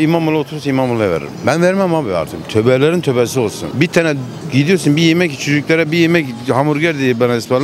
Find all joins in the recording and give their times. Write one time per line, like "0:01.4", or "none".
none